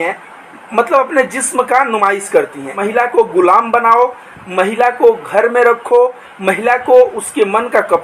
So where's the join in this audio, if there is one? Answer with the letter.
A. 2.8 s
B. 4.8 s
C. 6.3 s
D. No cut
A